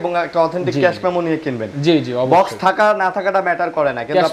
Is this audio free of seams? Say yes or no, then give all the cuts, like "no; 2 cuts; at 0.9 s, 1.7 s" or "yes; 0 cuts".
yes; 0 cuts